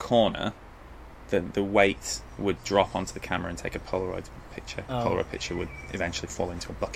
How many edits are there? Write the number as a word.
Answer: one